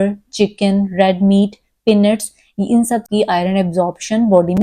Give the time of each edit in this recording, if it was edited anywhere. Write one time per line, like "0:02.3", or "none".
0:03.1